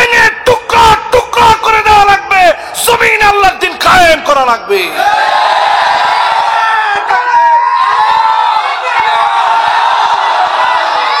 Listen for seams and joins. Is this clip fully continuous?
yes; 0 cuts

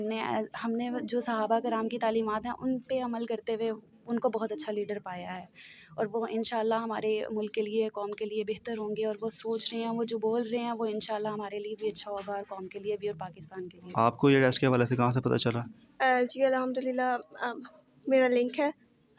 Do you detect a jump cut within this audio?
no; 0 cuts

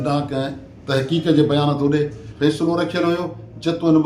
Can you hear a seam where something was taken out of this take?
yes; 1 cut; at 2.2 s

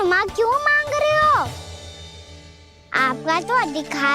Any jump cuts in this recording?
yes; 1 cut; at 1.5 s

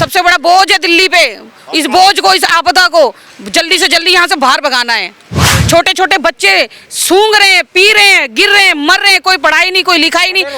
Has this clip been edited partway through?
yes; 1 cut; at 5.5 s

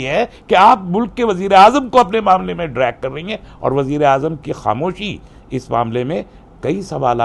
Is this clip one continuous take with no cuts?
yes; 0 cuts

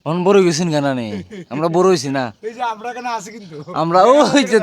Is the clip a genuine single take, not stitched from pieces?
yes; 0 cuts

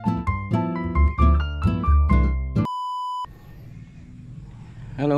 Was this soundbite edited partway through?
yes; 1 cut; at 2.7 s

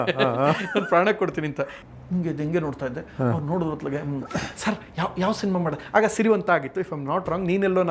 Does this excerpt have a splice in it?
yes; 1 cut; at 1.8 s

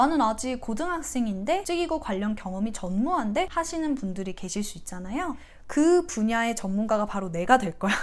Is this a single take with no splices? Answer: no; 3 cuts; at 1.6 s, 3.5 s, 5.5 s

